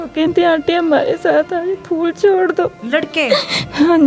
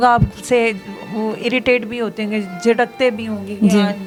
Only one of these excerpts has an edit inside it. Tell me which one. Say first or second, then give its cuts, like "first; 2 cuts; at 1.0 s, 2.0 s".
first; 1 cut; at 2.8 s